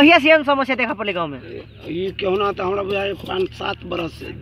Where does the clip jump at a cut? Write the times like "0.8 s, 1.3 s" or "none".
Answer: none